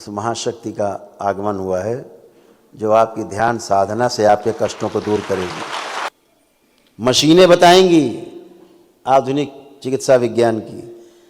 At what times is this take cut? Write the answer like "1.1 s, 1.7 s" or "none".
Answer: 6.1 s